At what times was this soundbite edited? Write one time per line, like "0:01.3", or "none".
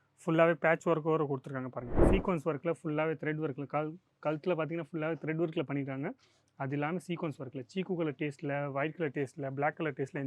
0:01.9